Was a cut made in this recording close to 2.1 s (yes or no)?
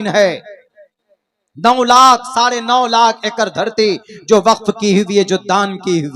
no